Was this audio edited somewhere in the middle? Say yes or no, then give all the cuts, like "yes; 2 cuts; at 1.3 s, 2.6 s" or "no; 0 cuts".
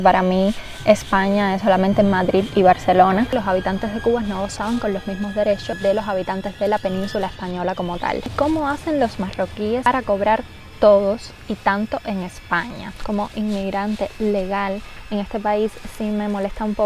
yes; 4 cuts; at 3.3 s, 5.8 s, 8.2 s, 13.0 s